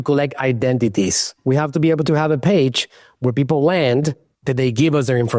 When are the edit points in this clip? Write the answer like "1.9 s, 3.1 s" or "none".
none